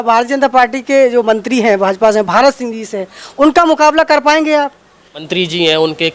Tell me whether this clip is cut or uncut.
cut